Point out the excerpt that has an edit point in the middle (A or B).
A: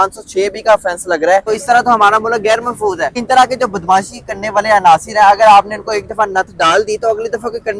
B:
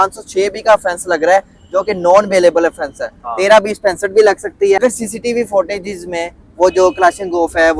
A